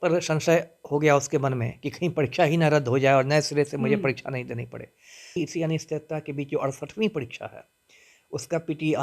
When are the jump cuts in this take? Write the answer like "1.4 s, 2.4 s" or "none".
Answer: 5.4 s